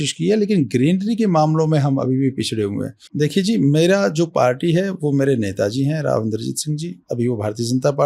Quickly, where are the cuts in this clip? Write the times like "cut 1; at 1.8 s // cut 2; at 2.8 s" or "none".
cut 1; at 3.0 s